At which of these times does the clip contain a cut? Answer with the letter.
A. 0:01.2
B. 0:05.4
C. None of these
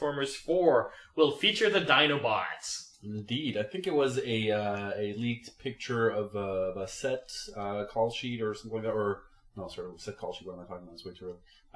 A